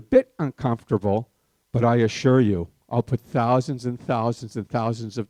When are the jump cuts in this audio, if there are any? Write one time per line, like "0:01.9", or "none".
none